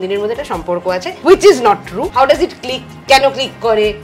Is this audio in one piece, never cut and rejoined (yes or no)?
no